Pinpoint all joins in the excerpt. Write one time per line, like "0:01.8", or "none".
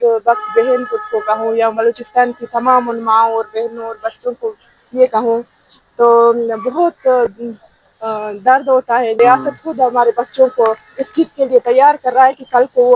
0:09.2